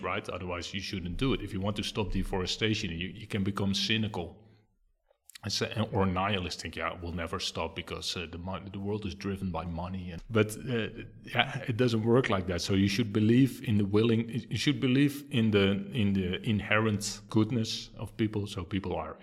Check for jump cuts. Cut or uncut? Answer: cut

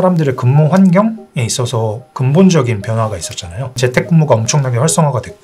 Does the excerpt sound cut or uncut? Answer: cut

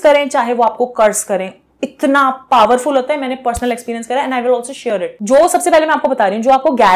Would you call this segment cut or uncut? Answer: cut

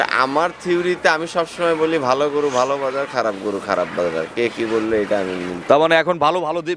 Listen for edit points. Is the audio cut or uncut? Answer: uncut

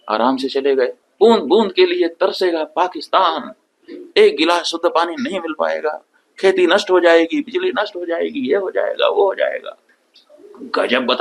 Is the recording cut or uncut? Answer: cut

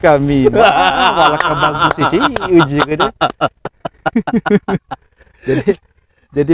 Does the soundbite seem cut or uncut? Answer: uncut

